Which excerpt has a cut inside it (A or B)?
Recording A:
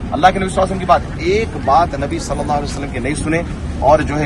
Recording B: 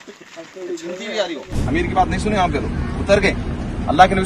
B